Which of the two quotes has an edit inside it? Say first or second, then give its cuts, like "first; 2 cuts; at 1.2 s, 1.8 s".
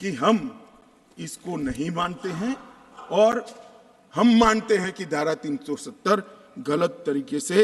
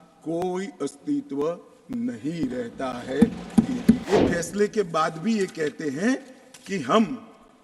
second; 1 cut; at 4.0 s